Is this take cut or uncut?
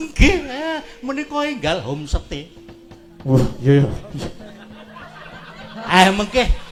uncut